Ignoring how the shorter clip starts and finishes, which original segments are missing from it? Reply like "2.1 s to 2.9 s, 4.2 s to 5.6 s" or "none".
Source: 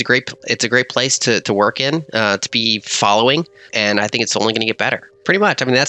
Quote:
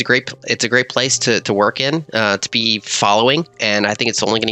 3.6 s to 3.7 s

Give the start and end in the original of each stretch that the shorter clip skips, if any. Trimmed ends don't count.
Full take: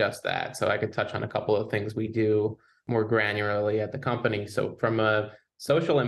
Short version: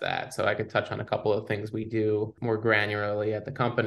2.6 s to 2.8 s

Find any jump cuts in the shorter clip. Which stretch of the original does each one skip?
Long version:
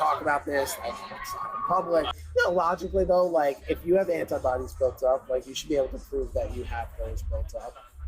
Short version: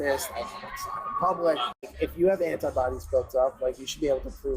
2.3 s to 3.5 s

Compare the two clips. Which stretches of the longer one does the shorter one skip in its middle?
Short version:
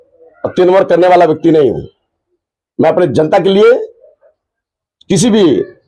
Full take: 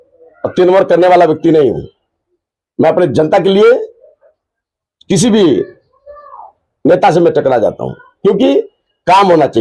none

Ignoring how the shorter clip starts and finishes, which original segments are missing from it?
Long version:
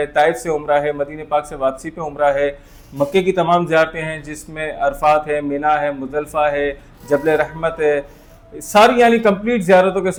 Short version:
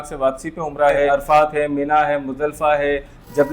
2.5 s to 4.8 s

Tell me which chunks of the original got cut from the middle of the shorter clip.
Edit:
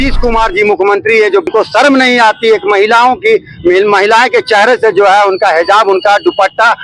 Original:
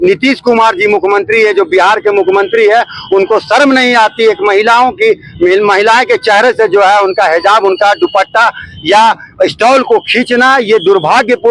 1.7 s to 3.2 s

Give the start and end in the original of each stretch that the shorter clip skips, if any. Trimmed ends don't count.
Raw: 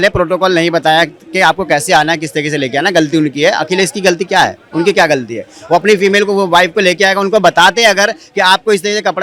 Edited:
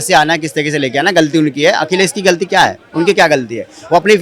none

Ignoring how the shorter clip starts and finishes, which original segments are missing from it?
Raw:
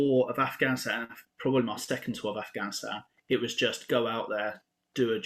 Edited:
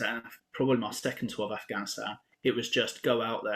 none

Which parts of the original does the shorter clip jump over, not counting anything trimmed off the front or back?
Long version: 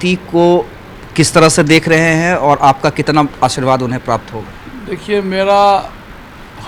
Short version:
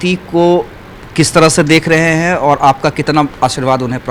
none

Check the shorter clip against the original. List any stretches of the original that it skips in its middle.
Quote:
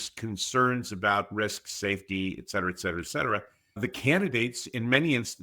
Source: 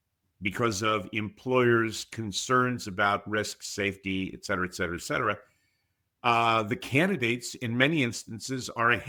5.7 s to 6.7 s

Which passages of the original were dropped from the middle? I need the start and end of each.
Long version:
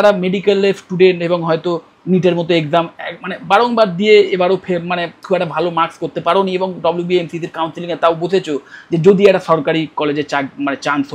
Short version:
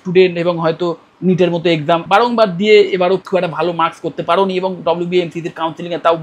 2.9 s to 3.4 s, 4.6 s to 5.2 s

